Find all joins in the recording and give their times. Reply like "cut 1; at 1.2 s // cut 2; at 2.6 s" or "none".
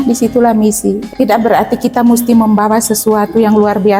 cut 1; at 1.0 s